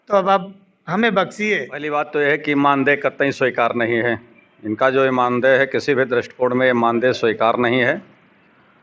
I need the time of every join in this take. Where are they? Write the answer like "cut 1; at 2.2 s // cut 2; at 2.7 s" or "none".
cut 1; at 1.8 s